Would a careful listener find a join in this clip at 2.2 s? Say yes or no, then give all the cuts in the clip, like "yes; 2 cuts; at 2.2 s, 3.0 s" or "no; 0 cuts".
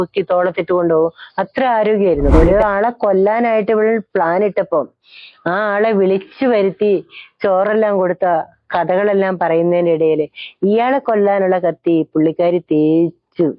yes; 1 cut; at 2.2 s